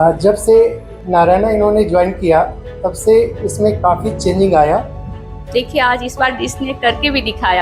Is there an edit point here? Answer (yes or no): yes